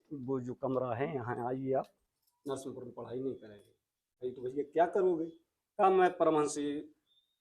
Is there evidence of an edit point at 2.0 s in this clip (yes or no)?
yes